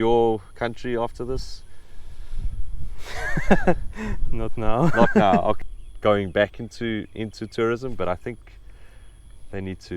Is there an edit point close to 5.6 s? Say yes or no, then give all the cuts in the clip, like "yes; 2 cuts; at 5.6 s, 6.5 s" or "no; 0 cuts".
yes; 1 cut; at 5.6 s